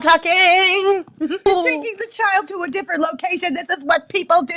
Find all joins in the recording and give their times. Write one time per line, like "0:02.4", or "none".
0:01.4